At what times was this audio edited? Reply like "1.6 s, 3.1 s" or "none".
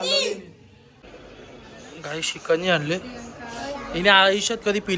0.9 s